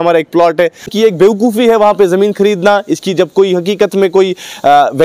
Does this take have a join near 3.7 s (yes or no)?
no